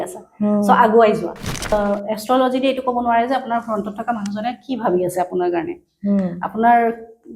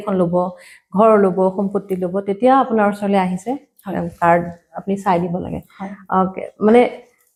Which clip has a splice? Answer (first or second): first